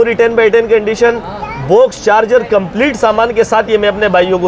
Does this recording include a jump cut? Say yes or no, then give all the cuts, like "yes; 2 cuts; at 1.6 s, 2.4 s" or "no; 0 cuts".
no; 0 cuts